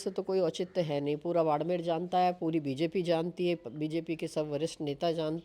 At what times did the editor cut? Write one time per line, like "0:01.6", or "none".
none